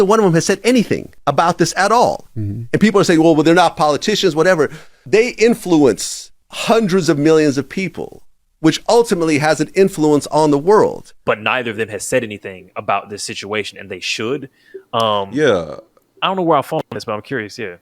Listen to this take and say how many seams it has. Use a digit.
0